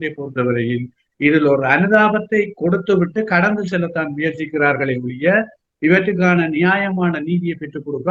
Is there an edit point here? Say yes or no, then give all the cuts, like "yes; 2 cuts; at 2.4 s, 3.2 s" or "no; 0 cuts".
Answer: no; 0 cuts